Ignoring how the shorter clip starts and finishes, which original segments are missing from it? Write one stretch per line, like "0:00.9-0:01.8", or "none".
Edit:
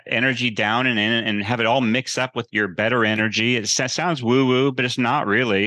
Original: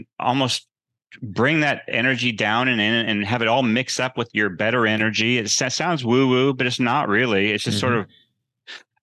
none

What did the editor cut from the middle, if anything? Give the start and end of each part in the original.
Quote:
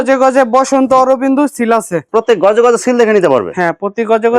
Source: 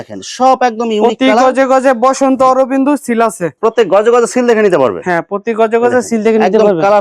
none

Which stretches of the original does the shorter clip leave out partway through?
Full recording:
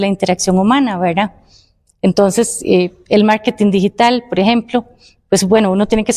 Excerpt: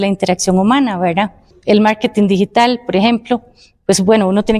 0:01.5-0:03.0

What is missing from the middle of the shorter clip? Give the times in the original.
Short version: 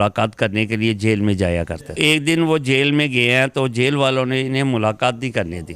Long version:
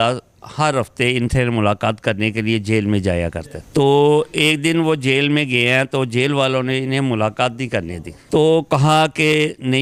0:03.6-0:04.3

